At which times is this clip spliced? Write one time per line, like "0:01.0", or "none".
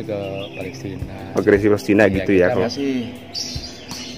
0:02.6